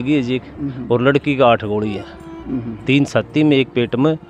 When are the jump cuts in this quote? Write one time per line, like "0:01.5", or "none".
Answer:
none